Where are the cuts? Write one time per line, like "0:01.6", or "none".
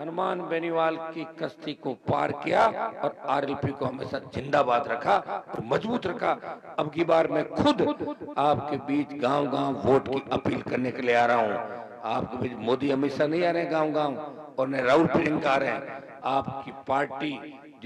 none